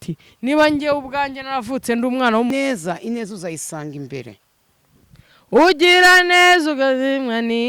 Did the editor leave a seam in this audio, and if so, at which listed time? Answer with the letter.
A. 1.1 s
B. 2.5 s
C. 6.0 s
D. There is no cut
B